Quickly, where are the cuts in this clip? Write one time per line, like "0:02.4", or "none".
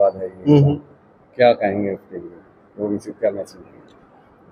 none